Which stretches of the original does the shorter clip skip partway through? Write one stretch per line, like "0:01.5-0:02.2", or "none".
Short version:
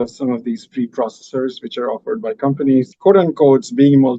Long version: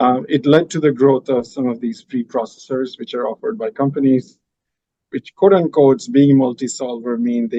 0:04.3-0:05.3